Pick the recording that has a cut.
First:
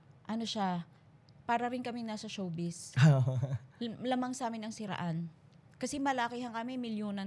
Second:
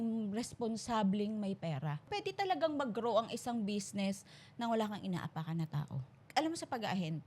second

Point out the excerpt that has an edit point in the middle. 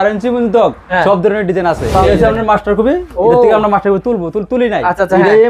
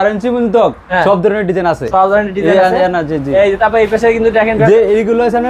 first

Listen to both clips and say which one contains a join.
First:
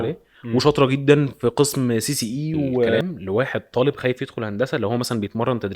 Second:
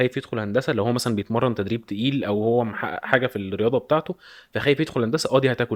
first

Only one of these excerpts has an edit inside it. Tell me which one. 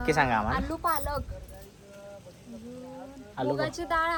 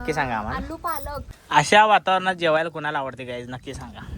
second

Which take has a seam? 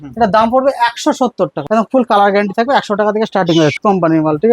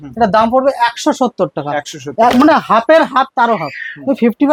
first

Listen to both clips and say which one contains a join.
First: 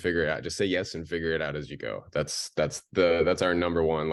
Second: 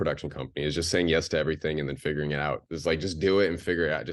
second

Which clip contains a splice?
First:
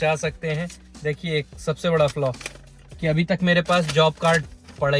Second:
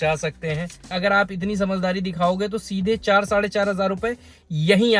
second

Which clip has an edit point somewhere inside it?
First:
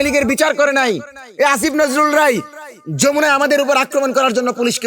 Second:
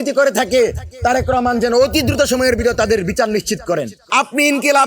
second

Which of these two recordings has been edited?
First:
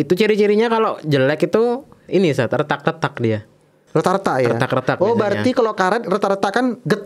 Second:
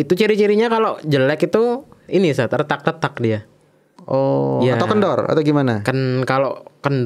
first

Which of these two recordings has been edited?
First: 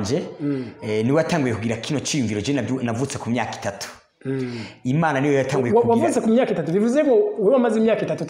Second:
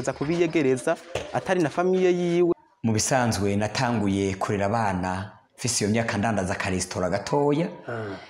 second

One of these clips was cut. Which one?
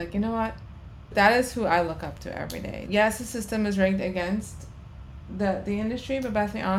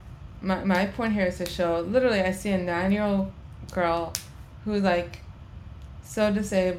first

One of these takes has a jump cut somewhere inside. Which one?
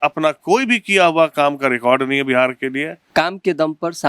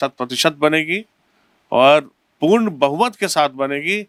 first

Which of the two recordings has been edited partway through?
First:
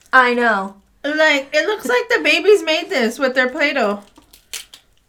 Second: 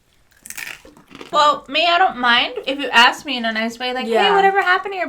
second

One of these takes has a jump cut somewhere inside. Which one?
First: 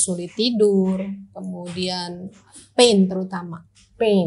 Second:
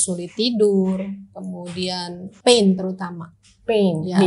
second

